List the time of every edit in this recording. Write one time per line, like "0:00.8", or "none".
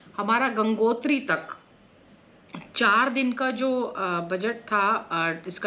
none

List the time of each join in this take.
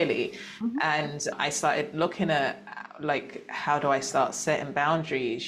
none

